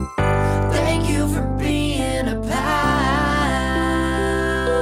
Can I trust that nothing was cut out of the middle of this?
yes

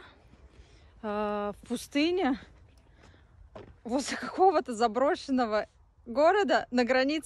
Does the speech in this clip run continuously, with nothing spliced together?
yes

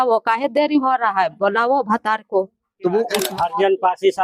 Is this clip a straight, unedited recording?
no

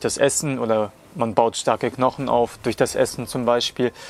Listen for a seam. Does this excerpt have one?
no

